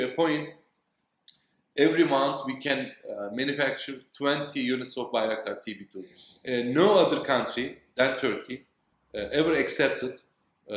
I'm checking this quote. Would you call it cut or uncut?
cut